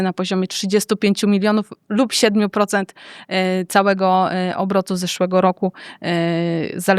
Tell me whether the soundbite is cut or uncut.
uncut